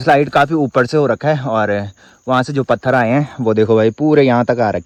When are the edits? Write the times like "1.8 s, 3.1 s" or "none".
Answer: none